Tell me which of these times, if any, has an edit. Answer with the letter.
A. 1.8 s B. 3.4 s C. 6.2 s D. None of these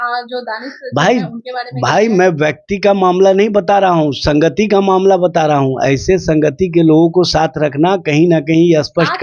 D